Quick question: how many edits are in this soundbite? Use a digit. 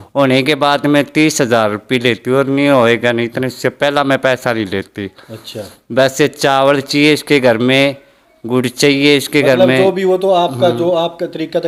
0